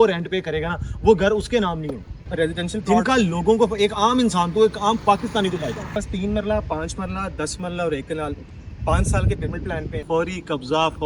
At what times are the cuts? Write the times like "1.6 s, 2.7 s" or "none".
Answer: 2.2 s, 5.9 s, 10.0 s

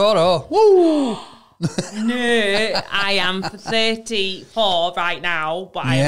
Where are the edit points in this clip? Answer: none

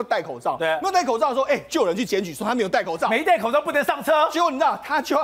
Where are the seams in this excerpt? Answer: none

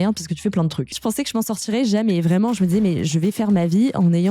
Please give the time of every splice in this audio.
1.0 s, 3.1 s

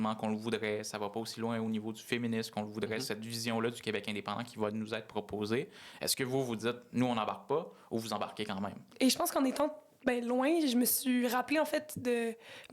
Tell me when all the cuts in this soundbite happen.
8.9 s

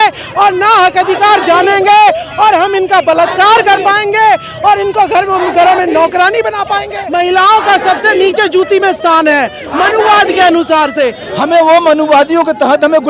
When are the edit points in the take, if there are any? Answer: 7.0 s, 11.2 s

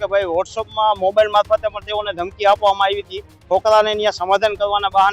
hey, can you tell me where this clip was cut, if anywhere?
3.3 s

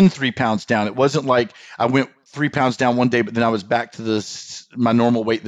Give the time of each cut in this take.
none

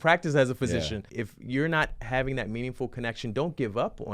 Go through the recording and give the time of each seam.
1.1 s

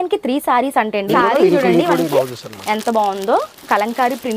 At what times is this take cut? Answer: 1.1 s

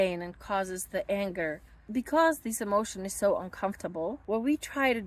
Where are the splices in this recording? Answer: 1.7 s, 4.2 s

